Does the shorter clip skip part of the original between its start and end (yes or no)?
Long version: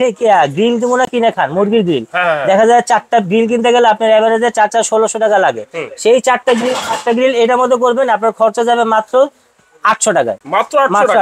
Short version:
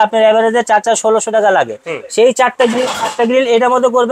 no